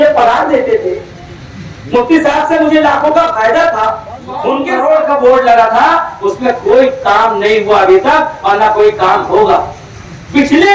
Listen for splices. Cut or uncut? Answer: cut